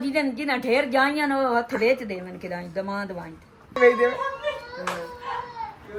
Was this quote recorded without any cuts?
yes; 0 cuts

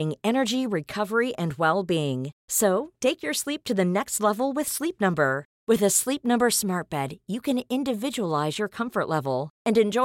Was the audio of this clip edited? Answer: no; 0 cuts

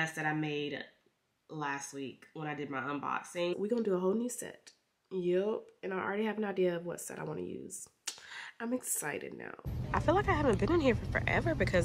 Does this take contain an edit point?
yes; 2 cuts; at 3.5 s, 9.7 s

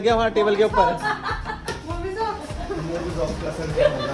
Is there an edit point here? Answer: no; 0 cuts

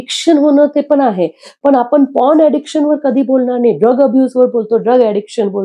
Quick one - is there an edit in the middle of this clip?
no; 0 cuts

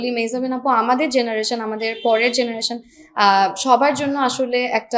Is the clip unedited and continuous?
yes; 0 cuts

